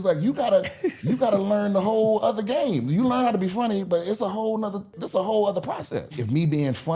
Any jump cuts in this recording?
yes; 2 cuts; at 5.0 s, 6.2 s

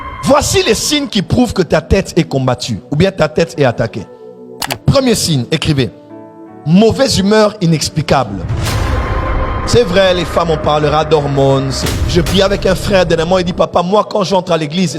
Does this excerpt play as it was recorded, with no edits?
no; 2 cuts; at 4.7 s, 11.8 s

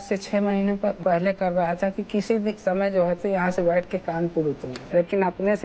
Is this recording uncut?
no; 2 cuts; at 1.0 s, 4.7 s

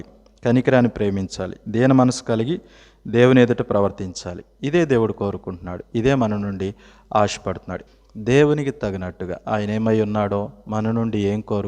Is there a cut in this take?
yes; 1 cut; at 7.7 s

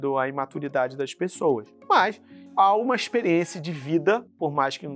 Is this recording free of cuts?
no; 1 cut; at 2.1 s

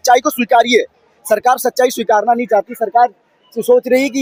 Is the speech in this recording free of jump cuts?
yes; 0 cuts

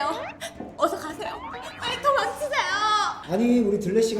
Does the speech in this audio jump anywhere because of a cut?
no; 0 cuts

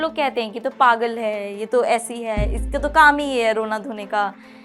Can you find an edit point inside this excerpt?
no; 0 cuts

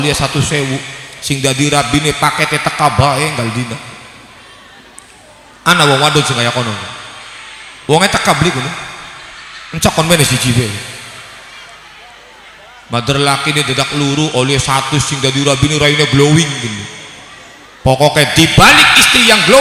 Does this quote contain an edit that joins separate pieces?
no; 0 cuts

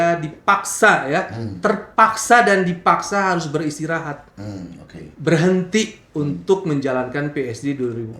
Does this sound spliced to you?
no; 0 cuts

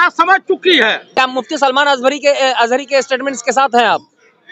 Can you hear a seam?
yes; 1 cut; at 1.1 s

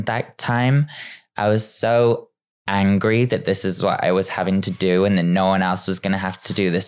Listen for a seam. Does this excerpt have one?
no; 0 cuts

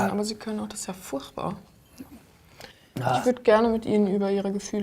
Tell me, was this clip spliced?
yes; 1 cut; at 3.2 s

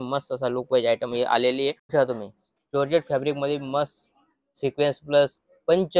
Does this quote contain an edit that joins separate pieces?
yes; 1 cut; at 1.8 s

